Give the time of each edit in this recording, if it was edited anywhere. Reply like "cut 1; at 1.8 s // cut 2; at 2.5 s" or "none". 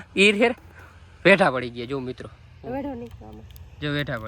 none